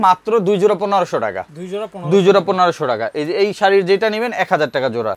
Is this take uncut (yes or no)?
yes